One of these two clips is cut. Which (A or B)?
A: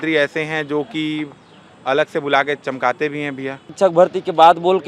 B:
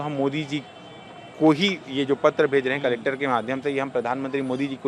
A